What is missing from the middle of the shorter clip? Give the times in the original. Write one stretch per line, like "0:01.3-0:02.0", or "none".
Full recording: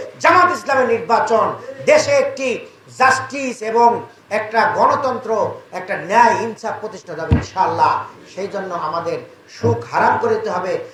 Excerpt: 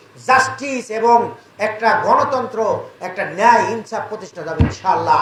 none